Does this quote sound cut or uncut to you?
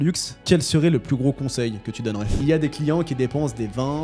cut